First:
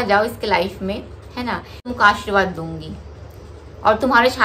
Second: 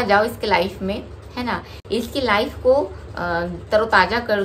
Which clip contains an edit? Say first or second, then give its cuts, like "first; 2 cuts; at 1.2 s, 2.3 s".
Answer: first; 1 cut; at 1.8 s